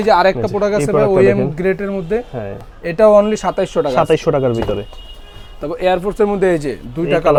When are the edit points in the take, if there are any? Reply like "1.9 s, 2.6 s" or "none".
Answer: none